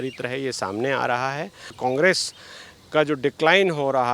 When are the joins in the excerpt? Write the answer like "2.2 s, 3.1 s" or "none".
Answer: 1.7 s